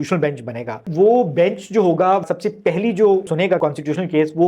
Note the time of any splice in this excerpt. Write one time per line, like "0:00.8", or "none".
0:00.9
0:02.3
0:03.4